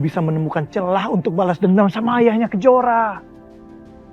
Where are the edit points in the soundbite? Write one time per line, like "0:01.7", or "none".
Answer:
0:03.2